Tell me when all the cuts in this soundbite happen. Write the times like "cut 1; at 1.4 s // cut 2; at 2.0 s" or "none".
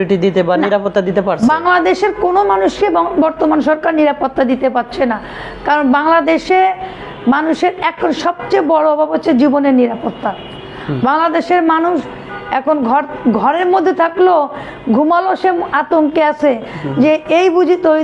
none